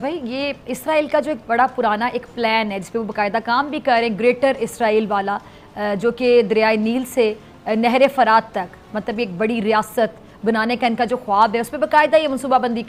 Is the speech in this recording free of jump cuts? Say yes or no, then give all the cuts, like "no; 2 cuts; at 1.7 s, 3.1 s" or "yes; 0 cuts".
yes; 0 cuts